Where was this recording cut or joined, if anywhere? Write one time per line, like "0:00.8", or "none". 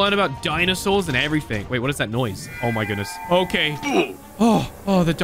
none

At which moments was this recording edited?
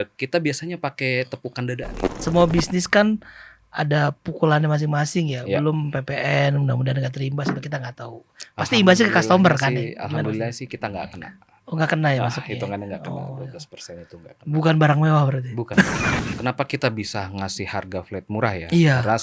0:02.1
0:16.3

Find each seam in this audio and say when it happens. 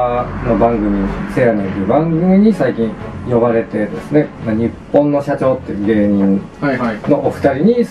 0:01.1
0:04.4

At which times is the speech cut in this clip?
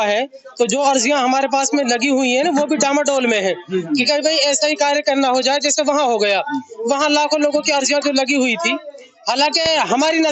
none

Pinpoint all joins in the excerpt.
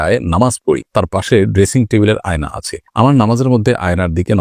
none

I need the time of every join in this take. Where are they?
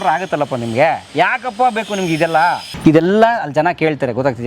0:02.7

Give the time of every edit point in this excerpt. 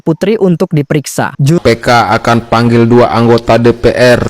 0:01.6

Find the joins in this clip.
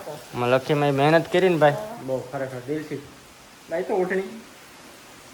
none

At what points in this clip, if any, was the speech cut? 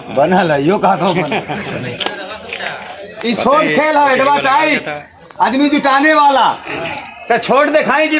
none

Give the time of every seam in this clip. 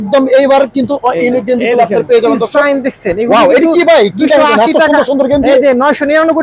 none

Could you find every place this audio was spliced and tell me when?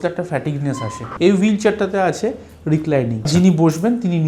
0:01.1
0:03.3

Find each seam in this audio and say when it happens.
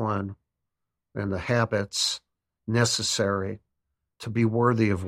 0:04.2

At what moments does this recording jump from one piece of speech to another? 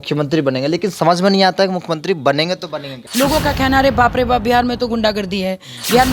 0:03.0

